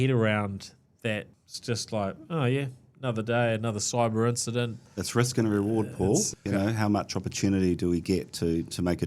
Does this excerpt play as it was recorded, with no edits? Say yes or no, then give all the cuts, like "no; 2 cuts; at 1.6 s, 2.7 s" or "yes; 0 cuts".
no; 3 cuts; at 1.3 s, 4.8 s, 6.4 s